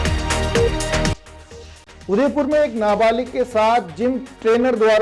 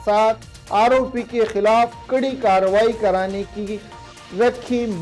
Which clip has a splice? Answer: first; 1 cut; at 1.1 s

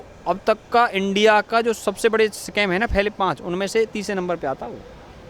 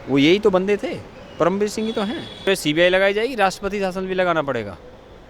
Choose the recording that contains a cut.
second; 1 cut; at 2.5 s

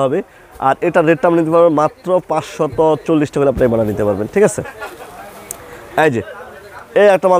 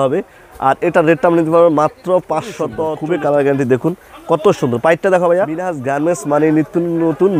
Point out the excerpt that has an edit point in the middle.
second; 2 cuts; at 2.9 s, 5.8 s

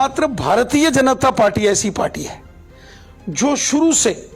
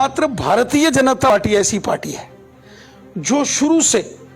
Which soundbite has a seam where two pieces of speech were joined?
second; 1 cut; at 1.3 s

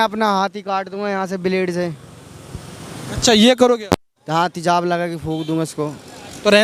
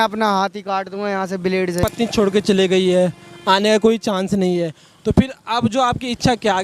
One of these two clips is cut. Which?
second; 1 cut; at 1.8 s

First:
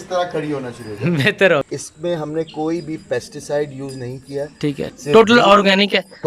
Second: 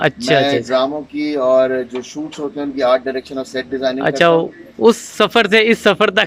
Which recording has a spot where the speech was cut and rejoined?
first; 1 cut; at 1.6 s

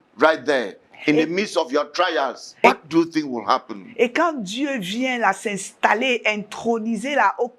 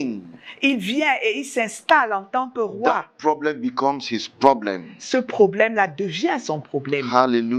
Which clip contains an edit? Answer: first; 1 cut; at 2.5 s

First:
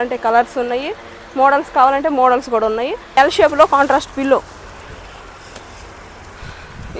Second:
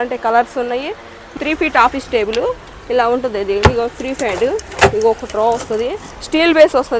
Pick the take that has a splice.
second; 2 cuts; at 1.3 s, 6.0 s

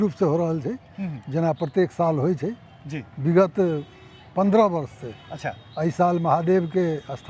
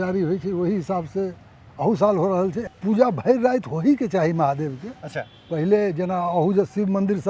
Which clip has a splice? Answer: second; 1 cut; at 2.6 s

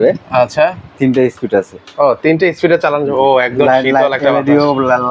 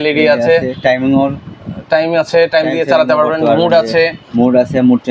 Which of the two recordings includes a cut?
first; 1 cut; at 1.0 s

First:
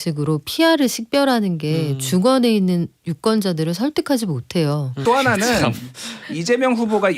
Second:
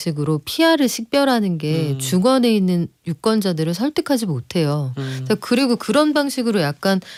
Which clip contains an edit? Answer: first; 1 cut; at 5.0 s

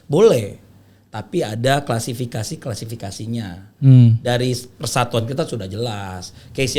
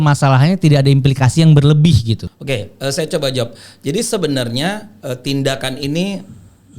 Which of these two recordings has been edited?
second; 1 cut; at 2.3 s

